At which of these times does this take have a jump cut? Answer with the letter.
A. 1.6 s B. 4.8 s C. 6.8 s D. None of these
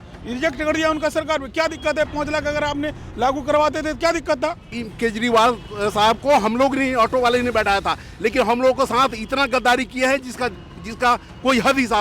B